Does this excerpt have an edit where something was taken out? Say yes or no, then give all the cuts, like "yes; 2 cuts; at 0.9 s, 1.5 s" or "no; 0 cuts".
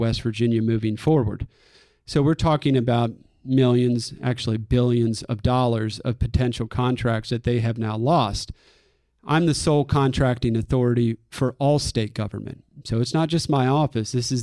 no; 0 cuts